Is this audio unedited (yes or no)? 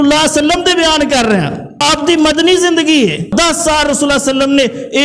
no